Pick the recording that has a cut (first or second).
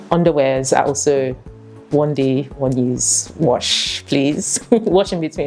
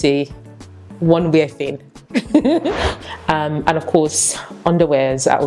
second